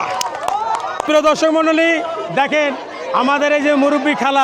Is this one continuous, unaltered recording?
no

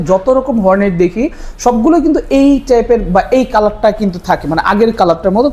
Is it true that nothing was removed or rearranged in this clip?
yes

